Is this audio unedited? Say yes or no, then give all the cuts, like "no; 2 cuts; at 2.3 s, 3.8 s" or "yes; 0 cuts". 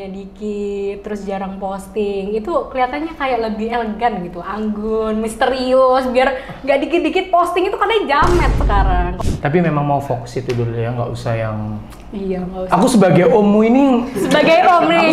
no; 1 cut; at 9.2 s